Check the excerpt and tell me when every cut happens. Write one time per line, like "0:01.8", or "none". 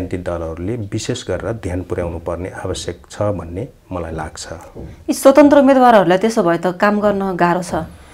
none